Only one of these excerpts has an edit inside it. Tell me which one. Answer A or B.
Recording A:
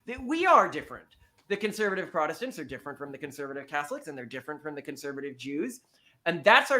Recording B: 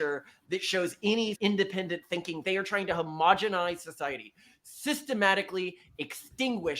B